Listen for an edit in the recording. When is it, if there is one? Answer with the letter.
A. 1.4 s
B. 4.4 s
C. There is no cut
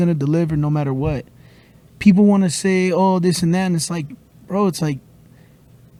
C